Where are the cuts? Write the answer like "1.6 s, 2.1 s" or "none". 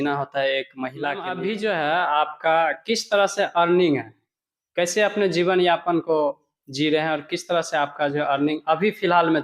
1.3 s